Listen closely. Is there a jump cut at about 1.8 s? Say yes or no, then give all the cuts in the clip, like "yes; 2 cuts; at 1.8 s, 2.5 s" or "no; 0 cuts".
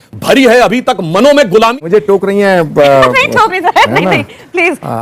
yes; 1 cut; at 1.8 s